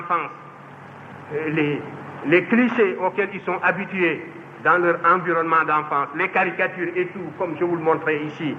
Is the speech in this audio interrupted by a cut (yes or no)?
no